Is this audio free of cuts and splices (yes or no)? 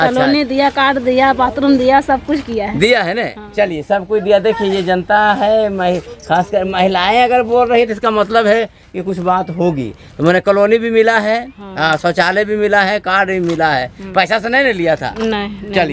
yes